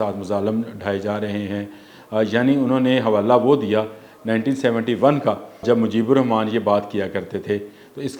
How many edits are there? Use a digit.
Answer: 1